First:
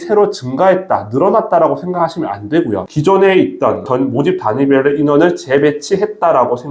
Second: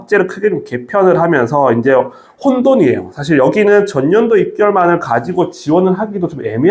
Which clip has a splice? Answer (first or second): first